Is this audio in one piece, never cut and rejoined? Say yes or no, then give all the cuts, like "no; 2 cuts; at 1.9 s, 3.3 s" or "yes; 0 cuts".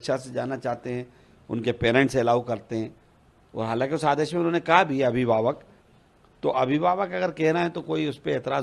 yes; 0 cuts